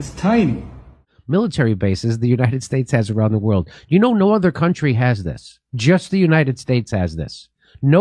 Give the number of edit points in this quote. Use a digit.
1